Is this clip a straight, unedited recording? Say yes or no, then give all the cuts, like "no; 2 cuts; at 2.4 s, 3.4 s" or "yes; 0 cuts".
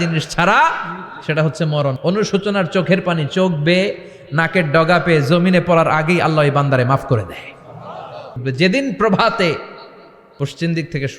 no; 2 cuts; at 2.0 s, 8.4 s